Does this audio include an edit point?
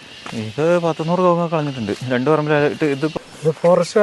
yes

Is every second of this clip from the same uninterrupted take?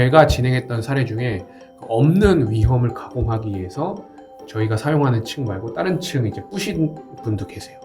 yes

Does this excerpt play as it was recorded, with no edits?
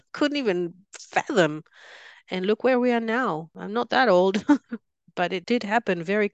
no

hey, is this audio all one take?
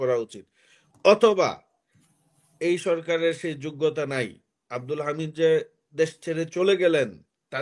yes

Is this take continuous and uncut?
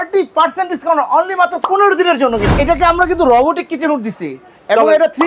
no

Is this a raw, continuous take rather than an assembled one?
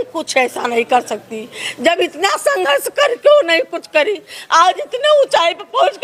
yes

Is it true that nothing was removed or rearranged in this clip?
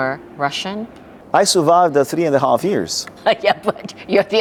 yes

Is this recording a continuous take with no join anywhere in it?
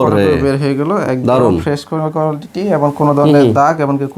yes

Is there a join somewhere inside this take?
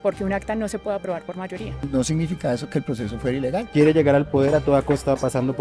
yes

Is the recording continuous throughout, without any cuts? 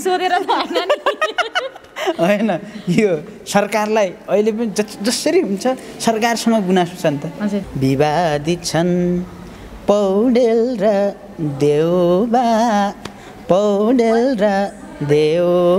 no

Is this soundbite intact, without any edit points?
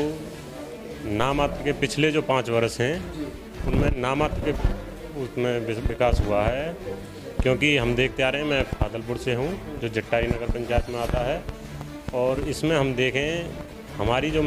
yes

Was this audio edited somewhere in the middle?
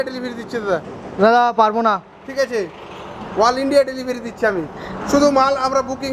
no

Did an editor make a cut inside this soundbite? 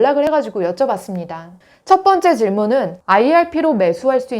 yes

